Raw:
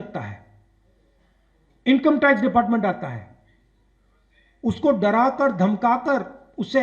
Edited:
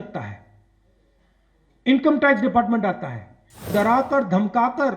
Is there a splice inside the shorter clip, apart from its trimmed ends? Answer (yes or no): yes